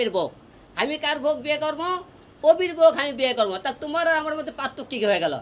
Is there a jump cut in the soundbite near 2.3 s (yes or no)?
no